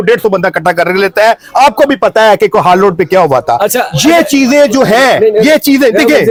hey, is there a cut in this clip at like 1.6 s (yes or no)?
no